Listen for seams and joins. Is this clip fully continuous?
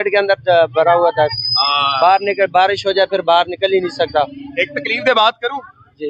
yes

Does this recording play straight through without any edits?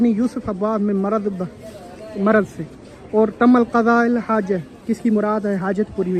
yes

